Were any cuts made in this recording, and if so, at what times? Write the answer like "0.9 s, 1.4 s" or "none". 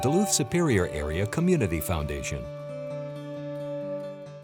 2.3 s